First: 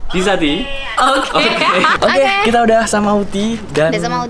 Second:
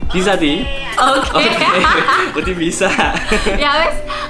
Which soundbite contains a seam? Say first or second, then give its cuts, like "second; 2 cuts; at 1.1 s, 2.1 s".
first; 1 cut; at 1.9 s